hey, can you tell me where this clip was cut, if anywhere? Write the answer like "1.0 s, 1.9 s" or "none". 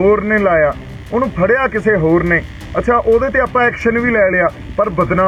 none